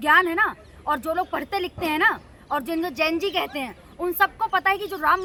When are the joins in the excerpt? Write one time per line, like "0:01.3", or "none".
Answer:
none